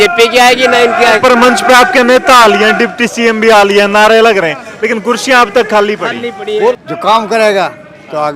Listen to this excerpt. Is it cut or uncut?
cut